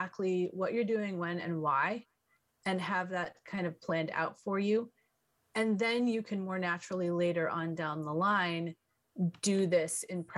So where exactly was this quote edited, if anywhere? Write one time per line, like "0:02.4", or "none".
none